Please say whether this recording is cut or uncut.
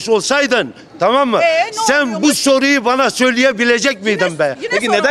uncut